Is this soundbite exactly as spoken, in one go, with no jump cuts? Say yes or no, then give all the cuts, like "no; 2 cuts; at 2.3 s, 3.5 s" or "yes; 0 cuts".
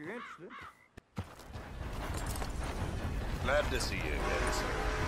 no; 1 cut; at 1.6 s